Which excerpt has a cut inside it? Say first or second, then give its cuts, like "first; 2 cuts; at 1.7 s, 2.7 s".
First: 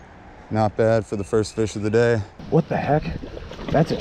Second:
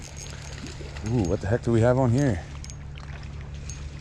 first; 1 cut; at 2.3 s